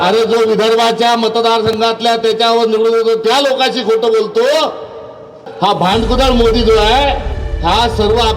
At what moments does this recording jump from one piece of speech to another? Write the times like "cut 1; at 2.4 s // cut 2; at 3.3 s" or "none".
cut 1; at 5.5 s